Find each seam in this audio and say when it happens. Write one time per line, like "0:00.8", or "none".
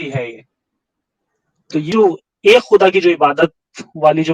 0:01.9